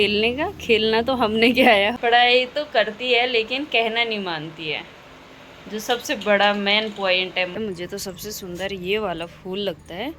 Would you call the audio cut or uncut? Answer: cut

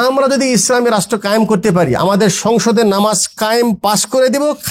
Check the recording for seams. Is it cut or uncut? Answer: uncut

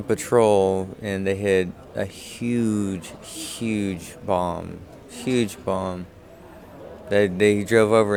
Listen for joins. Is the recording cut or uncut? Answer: uncut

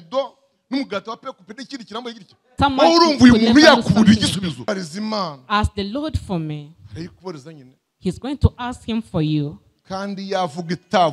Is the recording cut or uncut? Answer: cut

